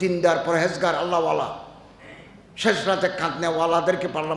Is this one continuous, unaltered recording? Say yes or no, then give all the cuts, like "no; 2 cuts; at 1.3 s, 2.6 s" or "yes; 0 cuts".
yes; 0 cuts